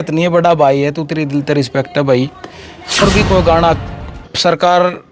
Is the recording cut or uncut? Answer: cut